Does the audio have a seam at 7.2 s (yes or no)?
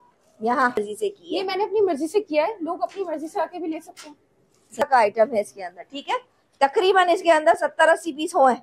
no